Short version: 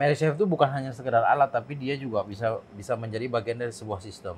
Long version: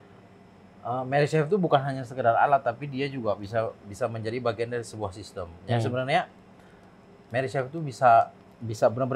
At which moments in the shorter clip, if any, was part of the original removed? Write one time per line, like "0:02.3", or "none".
none